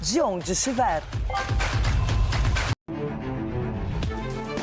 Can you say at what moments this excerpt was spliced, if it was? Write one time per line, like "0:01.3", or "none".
none

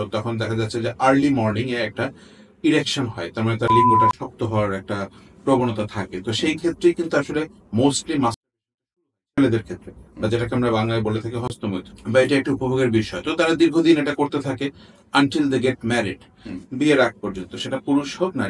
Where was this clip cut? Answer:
0:11.9

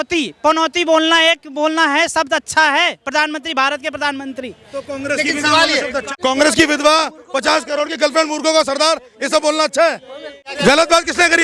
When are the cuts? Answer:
0:06.1
0:10.5

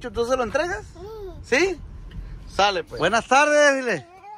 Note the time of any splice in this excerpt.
0:02.9

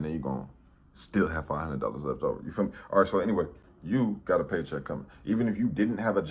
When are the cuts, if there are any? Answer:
0:03.7

